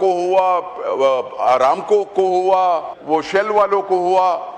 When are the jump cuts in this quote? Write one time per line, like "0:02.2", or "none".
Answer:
0:02.9